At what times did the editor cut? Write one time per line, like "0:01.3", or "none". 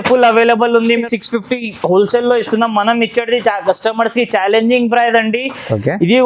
0:01.0